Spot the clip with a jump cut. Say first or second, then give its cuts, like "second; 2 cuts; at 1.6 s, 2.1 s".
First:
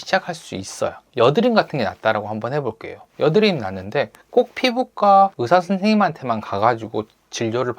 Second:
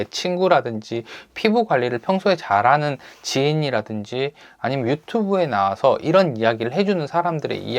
first; 1 cut; at 1.0 s